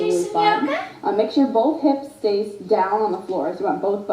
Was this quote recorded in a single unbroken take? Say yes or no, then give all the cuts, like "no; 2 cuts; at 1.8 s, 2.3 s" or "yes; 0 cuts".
no; 1 cut; at 2.3 s